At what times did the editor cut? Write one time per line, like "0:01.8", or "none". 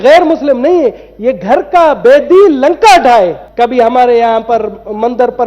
0:03.4